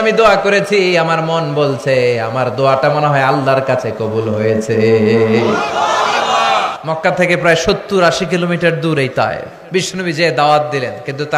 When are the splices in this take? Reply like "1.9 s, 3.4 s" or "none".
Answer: 6.7 s, 9.5 s